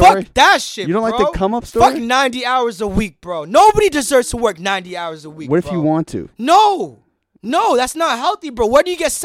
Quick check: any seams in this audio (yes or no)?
no